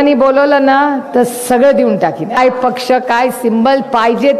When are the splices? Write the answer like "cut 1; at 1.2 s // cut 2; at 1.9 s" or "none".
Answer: cut 1; at 2.4 s

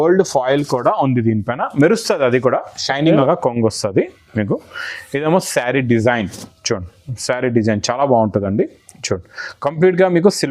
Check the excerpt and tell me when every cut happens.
cut 1; at 3.2 s

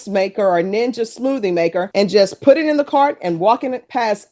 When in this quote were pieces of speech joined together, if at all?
none

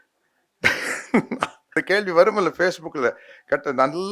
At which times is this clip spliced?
cut 1; at 1.8 s

